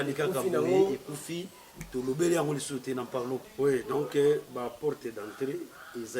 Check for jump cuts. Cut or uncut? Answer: cut